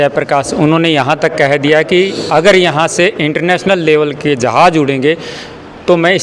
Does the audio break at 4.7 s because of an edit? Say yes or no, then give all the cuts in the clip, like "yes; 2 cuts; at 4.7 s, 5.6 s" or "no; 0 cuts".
no; 0 cuts